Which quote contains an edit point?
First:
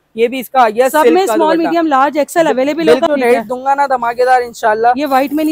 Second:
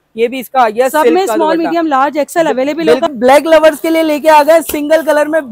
second; 1 cut; at 3.1 s

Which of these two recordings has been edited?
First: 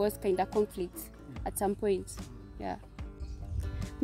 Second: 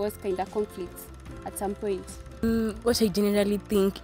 second; 1 cut; at 2.4 s

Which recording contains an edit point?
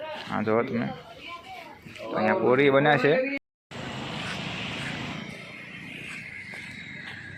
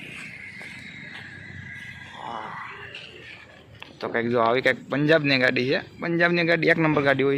first; 1 cut; at 3.4 s

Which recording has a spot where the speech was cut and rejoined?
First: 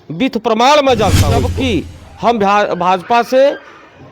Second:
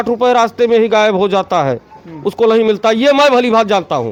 first; 1 cut; at 1.5 s

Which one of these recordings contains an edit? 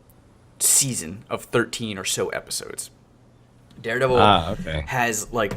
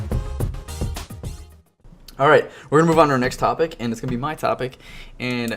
first; 1 cut; at 1.4 s

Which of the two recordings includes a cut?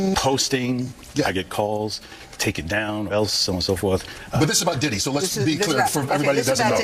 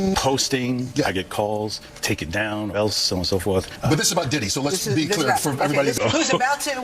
second; 4 cuts; at 0.9 s, 1.9 s, 3.7 s, 5.9 s

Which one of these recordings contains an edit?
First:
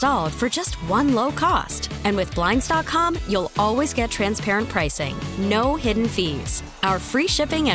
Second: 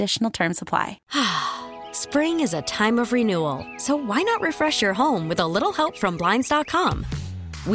second; 1 cut; at 1.0 s

